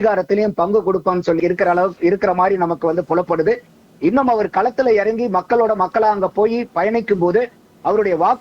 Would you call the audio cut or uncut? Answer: cut